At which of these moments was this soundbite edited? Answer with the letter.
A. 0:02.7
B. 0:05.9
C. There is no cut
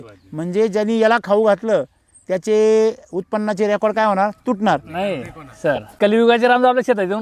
B